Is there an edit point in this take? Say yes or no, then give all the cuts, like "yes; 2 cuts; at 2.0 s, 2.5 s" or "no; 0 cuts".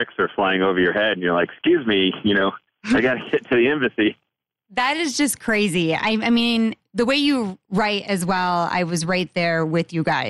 no; 0 cuts